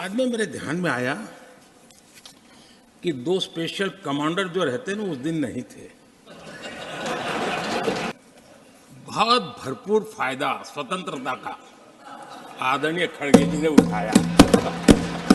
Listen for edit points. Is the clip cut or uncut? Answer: cut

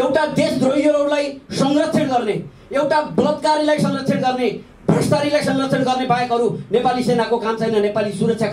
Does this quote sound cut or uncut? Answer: uncut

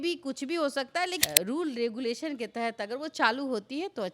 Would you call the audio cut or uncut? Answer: cut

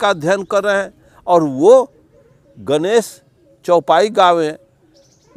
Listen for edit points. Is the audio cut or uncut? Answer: uncut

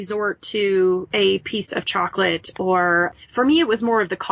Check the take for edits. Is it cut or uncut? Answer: cut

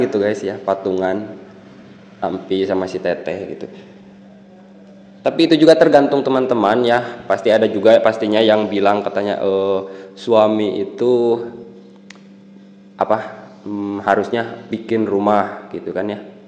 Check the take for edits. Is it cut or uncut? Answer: uncut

